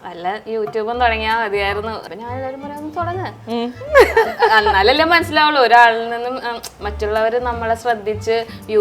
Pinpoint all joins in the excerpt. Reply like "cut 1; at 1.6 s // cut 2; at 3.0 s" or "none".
cut 1; at 2.0 s